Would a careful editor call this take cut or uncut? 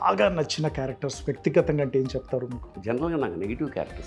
cut